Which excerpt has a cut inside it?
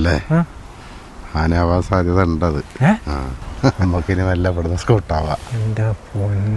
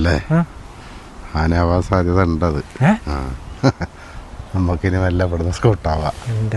first; 1 cut; at 3.8 s

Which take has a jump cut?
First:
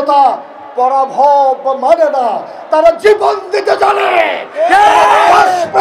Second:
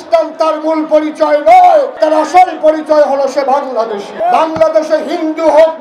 second; 2 cuts; at 1.9 s, 4.1 s

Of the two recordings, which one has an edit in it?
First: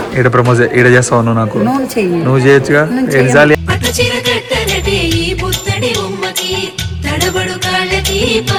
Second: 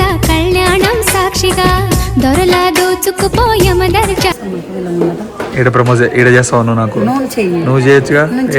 second; 1 cut; at 4.4 s

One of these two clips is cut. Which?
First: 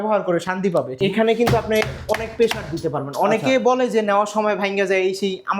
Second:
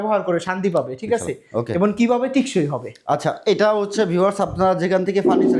first; 1 cut; at 0.9 s

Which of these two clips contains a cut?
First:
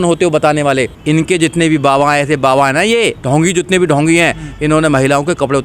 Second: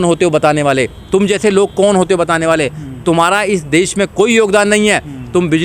first; 1 cut; at 0.9 s

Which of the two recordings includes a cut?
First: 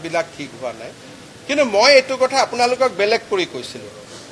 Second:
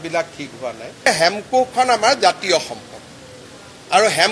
second; 1 cut; at 1.1 s

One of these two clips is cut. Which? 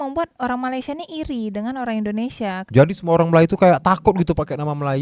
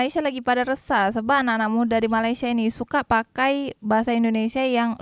first; 1 cut; at 2.6 s

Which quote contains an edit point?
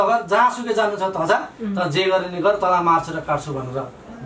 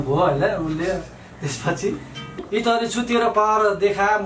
second; 1 cut; at 2.5 s

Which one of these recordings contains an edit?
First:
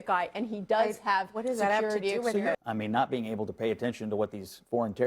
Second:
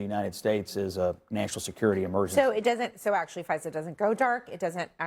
first; 1 cut; at 2.6 s

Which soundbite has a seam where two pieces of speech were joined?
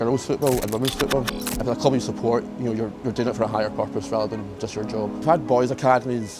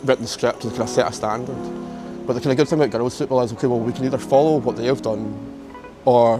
first; 2 cuts; at 1.4 s, 5.2 s

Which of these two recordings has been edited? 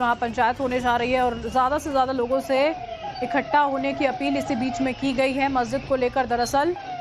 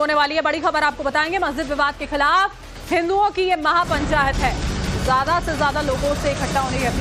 first; 1 cut; at 3.9 s

